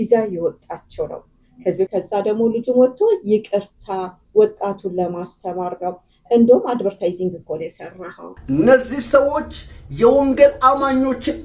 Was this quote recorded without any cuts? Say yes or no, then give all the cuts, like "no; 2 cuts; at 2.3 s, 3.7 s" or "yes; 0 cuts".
no; 2 cuts; at 1.9 s, 8.5 s